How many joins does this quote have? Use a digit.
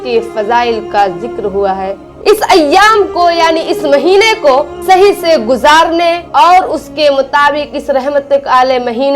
1